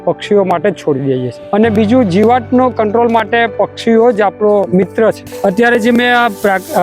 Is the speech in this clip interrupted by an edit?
yes; 2 cuts; at 1.4 s, 4.9 s

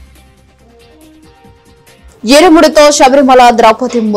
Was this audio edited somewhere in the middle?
yes; 1 cut; at 1.0 s

